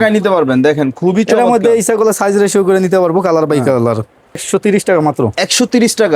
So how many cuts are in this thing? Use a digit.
1